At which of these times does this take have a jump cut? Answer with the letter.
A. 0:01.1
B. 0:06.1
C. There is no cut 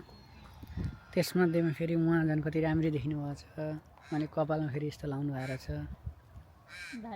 C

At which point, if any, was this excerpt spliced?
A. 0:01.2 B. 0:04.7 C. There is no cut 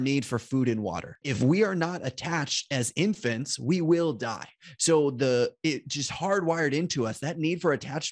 A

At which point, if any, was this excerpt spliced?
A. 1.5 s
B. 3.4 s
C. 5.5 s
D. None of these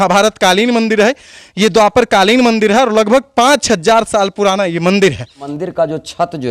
C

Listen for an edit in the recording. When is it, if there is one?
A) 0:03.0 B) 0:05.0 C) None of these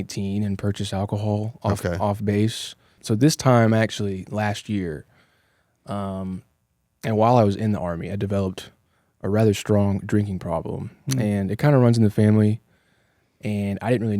A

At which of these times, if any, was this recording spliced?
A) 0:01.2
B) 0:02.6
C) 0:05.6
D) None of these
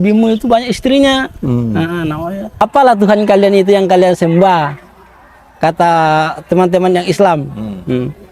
B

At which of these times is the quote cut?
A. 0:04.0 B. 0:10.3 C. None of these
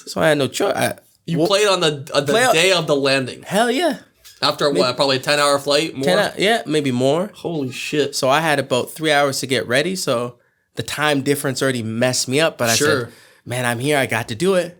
C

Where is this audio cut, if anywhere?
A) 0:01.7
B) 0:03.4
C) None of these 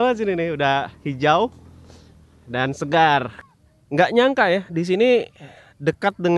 B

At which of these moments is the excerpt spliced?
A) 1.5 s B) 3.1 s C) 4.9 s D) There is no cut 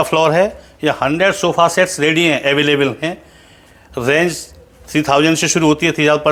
D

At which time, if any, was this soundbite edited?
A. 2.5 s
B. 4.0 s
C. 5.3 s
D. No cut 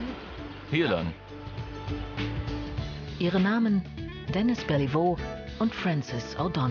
B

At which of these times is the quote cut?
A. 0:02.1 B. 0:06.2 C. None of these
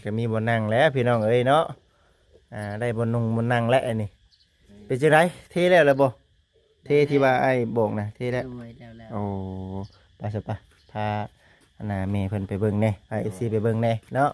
C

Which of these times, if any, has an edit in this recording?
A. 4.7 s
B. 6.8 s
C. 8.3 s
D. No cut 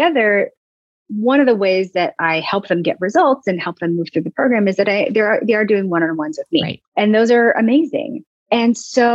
B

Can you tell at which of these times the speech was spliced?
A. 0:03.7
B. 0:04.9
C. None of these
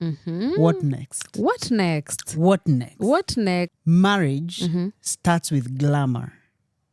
A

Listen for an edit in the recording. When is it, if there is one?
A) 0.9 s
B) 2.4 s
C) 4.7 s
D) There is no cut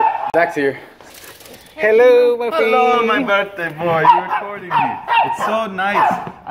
A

